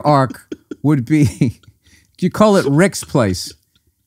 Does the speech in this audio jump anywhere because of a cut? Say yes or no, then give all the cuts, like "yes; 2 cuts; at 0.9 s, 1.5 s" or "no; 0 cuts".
no; 0 cuts